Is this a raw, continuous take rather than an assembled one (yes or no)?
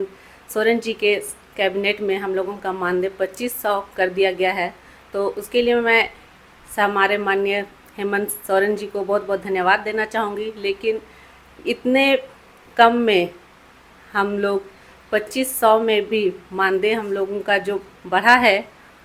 yes